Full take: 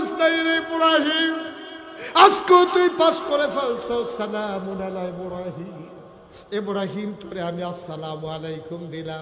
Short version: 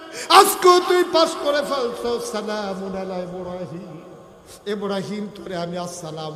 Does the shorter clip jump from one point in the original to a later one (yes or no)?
no